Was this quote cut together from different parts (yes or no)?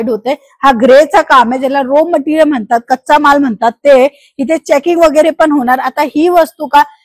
no